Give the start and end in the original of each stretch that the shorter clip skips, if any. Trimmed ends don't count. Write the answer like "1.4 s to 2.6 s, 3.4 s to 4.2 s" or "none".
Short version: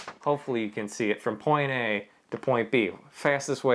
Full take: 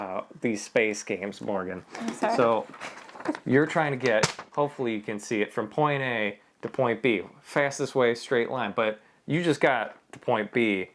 none